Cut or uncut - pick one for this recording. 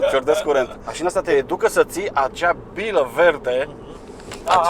uncut